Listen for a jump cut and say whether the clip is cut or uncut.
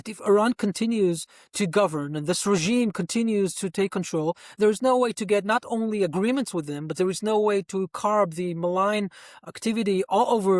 cut